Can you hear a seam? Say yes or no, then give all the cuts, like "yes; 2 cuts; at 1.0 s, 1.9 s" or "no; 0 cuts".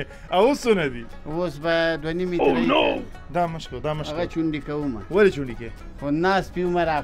no; 0 cuts